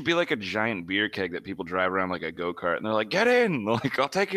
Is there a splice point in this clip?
no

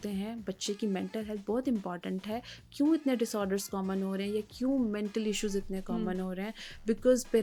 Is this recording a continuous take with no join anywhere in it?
yes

